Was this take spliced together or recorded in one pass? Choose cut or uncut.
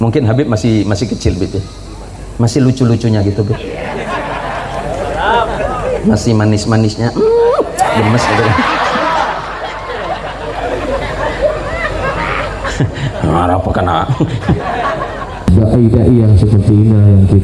cut